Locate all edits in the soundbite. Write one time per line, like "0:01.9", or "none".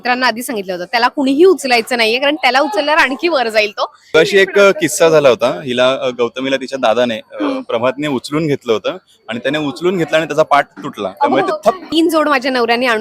0:04.1
0:11.8